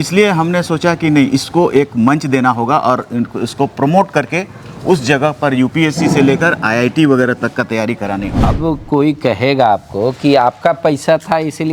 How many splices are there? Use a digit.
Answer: 1